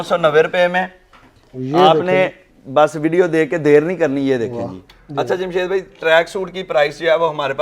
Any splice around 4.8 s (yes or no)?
yes